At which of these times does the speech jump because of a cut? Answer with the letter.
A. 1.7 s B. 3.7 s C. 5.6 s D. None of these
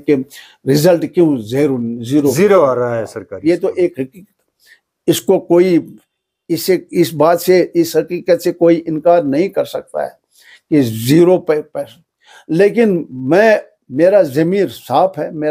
D